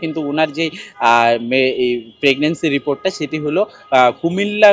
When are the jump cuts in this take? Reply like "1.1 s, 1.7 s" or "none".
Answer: none